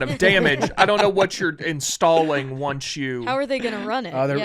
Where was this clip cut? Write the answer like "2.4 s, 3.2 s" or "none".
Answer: none